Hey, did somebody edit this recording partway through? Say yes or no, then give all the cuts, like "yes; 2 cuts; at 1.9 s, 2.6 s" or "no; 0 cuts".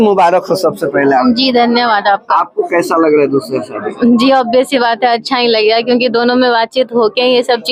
no; 0 cuts